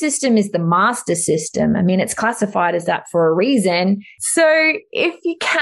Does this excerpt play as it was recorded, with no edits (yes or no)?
no